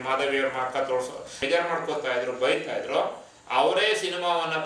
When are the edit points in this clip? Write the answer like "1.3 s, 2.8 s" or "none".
1.4 s